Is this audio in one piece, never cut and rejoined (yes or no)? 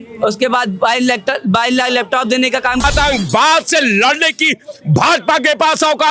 no